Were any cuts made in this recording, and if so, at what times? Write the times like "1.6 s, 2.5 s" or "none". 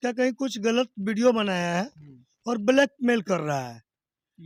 none